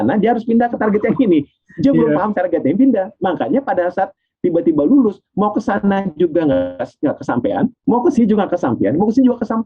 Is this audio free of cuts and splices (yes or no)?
yes